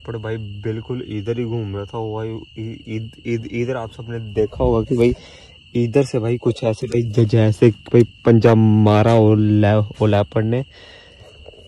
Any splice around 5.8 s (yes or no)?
no